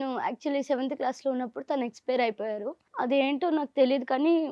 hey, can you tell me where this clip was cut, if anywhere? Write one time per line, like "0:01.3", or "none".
0:02.8